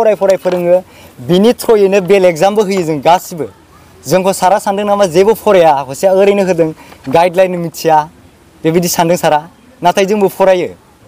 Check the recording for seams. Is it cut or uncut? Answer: uncut